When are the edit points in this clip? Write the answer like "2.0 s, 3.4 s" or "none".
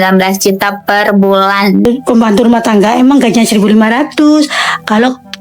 1.8 s